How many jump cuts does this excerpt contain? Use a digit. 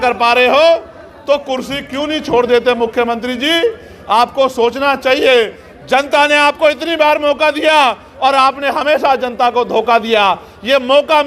0